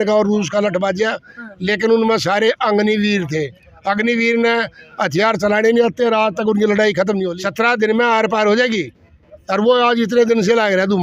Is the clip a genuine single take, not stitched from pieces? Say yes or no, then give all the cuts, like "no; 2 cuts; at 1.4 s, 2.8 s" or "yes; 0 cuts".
no; 1 cut; at 7.3 s